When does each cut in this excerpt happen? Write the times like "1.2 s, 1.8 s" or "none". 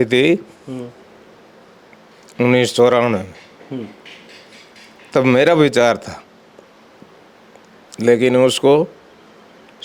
none